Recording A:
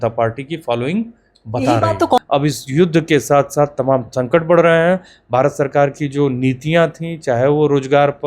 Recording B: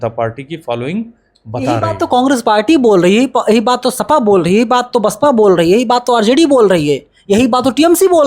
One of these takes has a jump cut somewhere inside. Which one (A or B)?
A